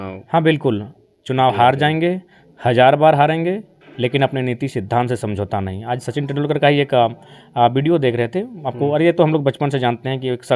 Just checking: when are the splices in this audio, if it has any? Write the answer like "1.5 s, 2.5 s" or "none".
none

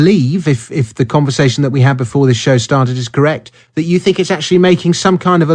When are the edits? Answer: none

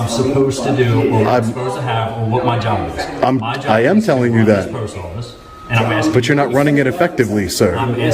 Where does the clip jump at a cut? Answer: none

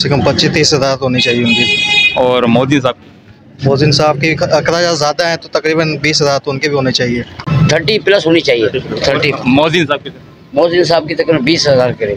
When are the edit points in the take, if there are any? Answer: 7.5 s

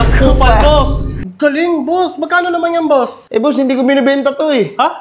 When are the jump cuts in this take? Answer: 1.2 s

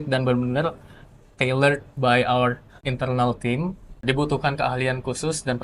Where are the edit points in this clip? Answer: 2.8 s, 4.0 s

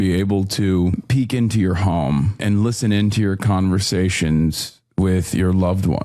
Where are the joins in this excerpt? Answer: 1.0 s, 2.4 s

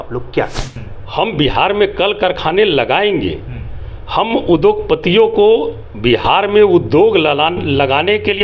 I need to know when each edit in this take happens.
none

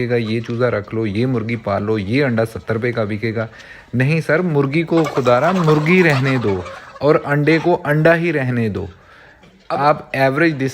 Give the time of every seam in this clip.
9.5 s

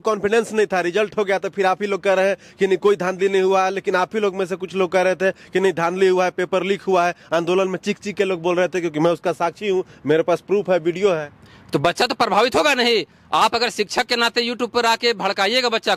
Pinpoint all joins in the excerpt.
none

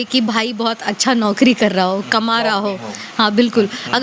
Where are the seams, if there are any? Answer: none

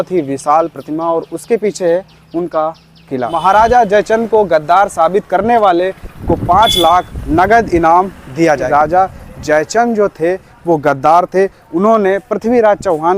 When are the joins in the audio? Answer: 3.3 s, 7.2 s, 8.7 s

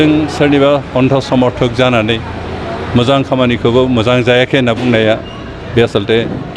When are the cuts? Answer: none

